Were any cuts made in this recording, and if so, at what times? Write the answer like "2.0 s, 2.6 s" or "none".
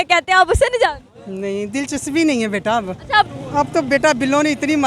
3.3 s